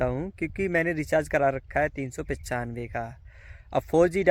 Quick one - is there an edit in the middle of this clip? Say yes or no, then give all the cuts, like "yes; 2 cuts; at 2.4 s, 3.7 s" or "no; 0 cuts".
no; 0 cuts